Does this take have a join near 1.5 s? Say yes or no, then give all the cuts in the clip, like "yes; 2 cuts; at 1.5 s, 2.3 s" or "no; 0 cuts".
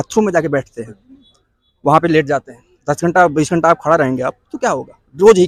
no; 0 cuts